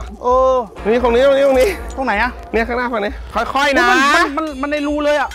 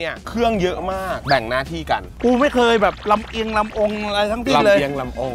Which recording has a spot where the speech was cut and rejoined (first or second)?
second